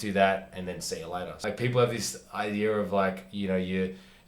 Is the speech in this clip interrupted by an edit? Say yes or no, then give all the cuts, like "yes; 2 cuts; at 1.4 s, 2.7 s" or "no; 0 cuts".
yes; 1 cut; at 1.4 s